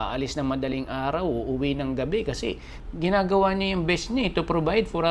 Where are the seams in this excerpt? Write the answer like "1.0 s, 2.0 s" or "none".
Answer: 2.7 s